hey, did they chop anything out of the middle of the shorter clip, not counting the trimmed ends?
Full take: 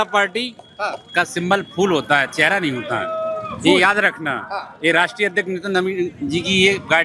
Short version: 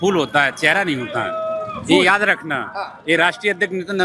no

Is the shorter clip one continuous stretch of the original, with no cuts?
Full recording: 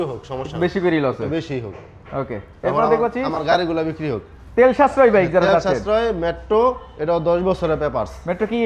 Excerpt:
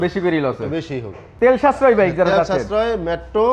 no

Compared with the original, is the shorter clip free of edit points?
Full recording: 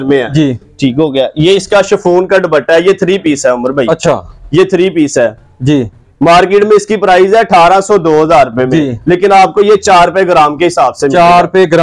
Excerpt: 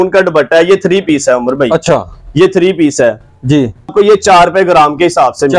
no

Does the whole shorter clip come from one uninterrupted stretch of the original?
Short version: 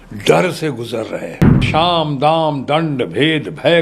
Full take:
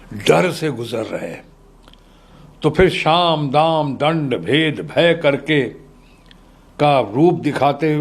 no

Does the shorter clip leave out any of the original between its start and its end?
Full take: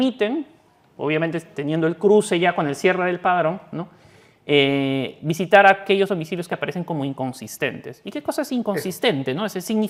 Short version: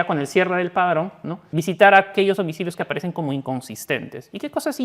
yes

